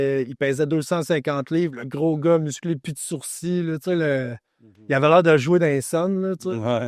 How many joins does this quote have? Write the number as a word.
zero